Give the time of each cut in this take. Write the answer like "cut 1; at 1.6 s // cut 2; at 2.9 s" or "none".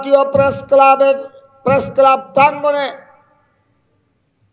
none